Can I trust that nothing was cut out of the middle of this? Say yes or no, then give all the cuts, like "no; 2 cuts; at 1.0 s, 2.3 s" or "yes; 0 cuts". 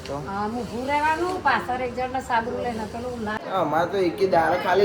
no; 1 cut; at 3.4 s